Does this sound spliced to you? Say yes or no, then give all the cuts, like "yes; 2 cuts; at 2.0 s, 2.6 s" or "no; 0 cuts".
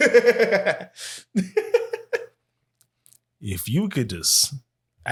no; 0 cuts